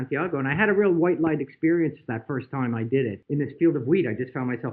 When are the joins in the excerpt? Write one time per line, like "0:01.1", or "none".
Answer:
0:03.2